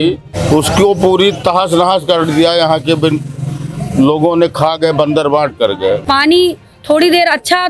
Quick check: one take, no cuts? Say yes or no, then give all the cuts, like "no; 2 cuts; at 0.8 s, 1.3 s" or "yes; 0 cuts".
no; 1 cut; at 6.0 s